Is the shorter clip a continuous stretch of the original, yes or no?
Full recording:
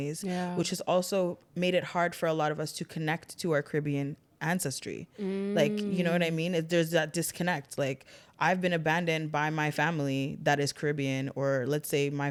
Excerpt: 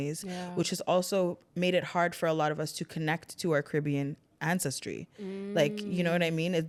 yes